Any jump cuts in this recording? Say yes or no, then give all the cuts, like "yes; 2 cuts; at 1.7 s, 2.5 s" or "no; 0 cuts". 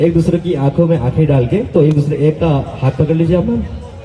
yes; 1 cut; at 3.0 s